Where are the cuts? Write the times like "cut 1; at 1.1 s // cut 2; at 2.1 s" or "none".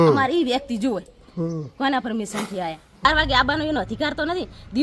cut 1; at 3.1 s